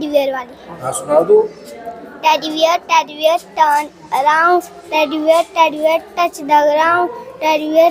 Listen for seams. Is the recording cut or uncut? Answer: uncut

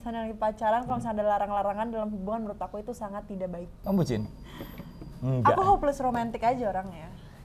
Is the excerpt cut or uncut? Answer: cut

